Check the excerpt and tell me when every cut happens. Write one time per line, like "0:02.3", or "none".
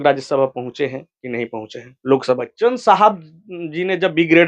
0:02.4